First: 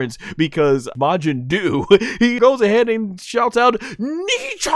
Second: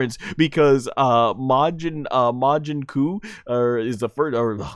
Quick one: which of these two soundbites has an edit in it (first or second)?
first